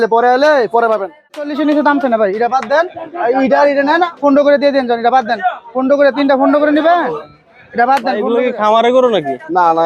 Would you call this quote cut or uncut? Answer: cut